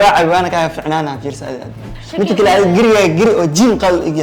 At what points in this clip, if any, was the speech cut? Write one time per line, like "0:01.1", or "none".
0:01.9